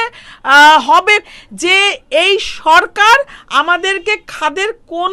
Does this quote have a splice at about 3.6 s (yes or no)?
no